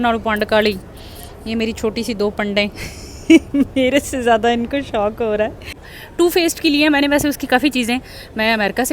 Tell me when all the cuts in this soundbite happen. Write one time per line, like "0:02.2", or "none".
0:06.0